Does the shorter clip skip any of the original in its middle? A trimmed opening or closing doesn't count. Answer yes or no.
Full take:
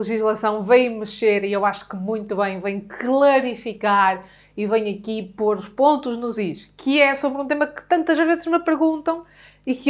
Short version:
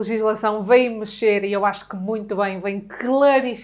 no